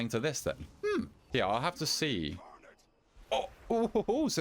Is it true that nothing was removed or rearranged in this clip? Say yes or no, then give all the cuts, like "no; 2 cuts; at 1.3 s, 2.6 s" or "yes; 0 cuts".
no; 1 cut; at 1.2 s